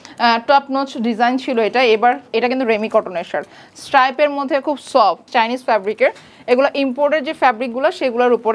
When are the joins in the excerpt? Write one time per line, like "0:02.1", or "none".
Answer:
0:02.2
0:05.2